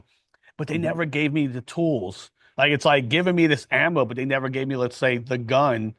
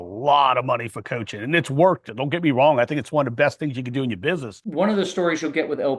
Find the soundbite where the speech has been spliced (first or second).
second